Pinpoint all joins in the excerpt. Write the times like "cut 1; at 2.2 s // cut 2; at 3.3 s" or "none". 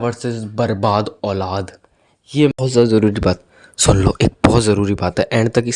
cut 1; at 2.6 s